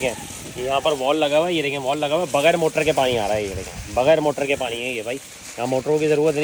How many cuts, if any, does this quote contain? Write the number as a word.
zero